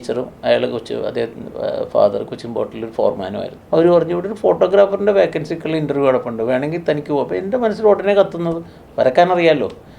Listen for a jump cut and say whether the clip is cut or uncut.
cut